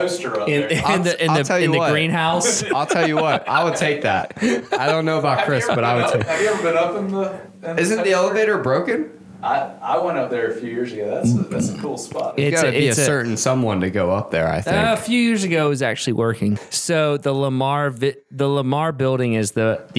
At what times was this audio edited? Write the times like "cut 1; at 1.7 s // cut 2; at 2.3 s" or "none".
cut 1; at 16.7 s